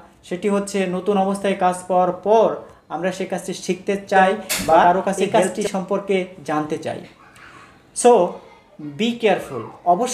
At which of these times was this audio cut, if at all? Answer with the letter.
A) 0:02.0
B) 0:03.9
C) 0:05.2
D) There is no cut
C